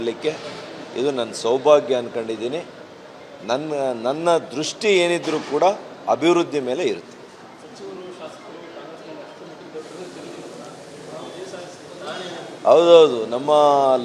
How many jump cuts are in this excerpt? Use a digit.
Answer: 1